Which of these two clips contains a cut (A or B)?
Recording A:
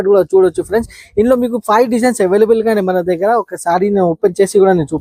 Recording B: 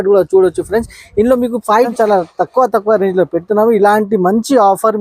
B